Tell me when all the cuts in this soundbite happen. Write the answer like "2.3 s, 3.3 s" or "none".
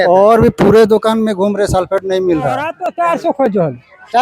2.8 s